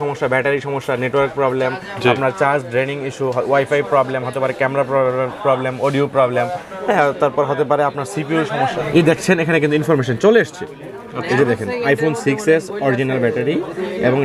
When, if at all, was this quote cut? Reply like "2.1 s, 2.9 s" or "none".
8.7 s